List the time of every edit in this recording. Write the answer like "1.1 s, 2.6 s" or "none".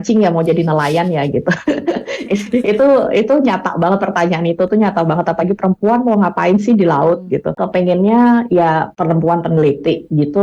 7.6 s, 8.9 s